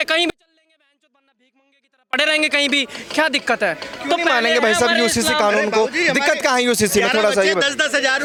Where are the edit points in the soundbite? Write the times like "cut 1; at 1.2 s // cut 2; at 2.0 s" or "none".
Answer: none